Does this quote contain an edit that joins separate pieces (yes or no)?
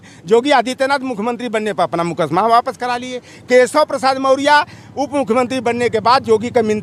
no